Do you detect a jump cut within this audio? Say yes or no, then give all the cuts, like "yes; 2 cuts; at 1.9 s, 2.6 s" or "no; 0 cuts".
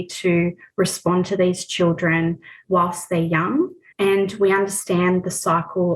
yes; 1 cut; at 2.5 s